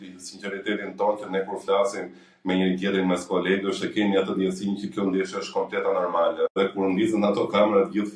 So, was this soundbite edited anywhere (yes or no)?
yes